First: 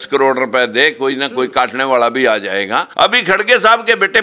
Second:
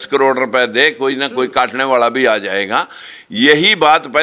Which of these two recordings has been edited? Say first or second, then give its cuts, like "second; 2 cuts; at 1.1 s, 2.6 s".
first; 1 cut; at 2.8 s